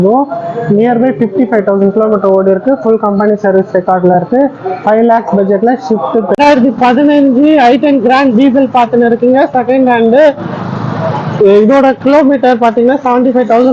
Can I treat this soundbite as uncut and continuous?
no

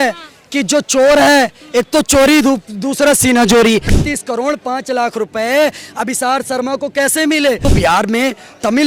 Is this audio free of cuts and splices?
no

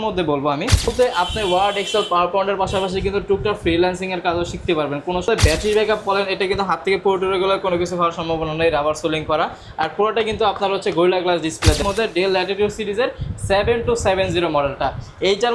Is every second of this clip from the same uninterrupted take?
no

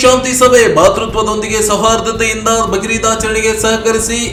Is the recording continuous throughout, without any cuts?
yes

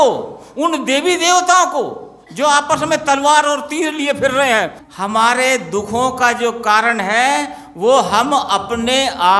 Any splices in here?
yes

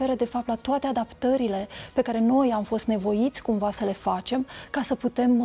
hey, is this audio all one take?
yes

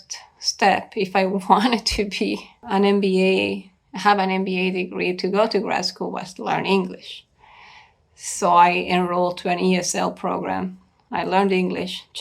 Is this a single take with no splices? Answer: no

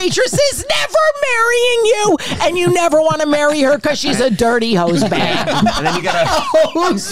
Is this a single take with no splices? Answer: yes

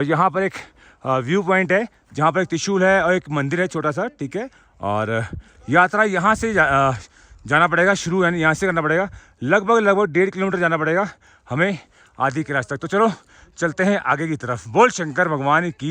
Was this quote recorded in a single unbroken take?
yes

